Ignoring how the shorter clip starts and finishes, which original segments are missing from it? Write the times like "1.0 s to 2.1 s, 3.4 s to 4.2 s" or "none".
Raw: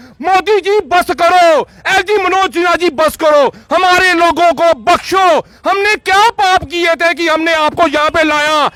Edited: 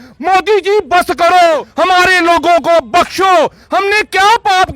1.7 s to 3.6 s